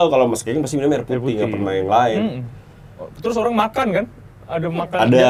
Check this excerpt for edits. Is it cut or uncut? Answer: uncut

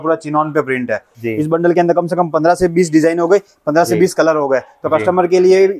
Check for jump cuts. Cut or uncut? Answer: cut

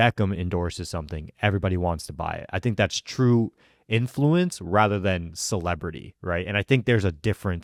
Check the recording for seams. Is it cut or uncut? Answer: uncut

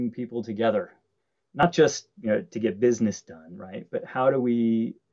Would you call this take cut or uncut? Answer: cut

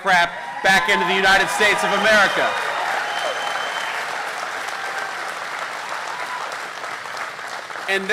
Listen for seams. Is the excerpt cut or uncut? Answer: uncut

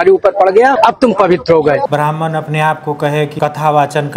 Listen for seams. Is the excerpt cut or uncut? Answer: cut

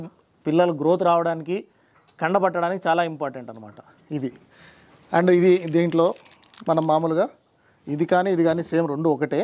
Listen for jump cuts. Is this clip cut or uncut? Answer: uncut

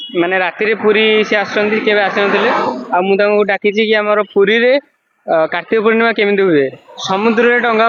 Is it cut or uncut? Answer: uncut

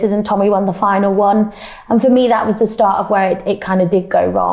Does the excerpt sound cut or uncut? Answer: uncut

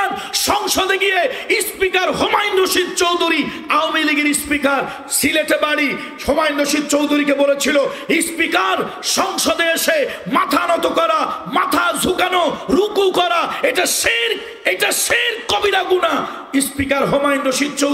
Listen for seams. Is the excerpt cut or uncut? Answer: uncut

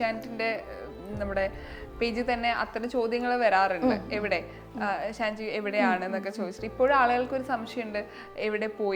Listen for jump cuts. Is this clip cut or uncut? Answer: uncut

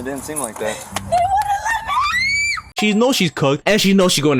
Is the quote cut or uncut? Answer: uncut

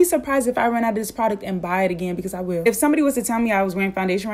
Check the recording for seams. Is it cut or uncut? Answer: cut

